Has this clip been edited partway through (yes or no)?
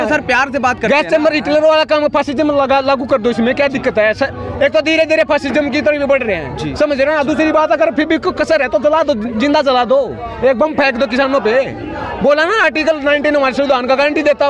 no